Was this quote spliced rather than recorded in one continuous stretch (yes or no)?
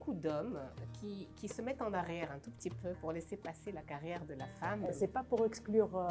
yes